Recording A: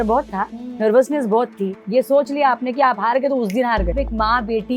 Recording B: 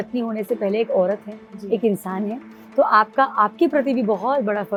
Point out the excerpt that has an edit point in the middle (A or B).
A